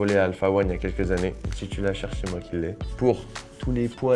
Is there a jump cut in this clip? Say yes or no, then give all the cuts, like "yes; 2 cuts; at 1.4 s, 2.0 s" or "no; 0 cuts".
no; 0 cuts